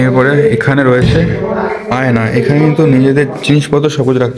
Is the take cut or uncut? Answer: uncut